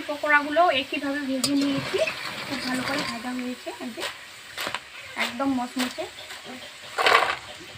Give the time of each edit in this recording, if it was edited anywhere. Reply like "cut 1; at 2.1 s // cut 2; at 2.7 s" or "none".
none